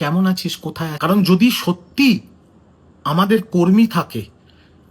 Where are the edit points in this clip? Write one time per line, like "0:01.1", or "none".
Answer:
0:00.9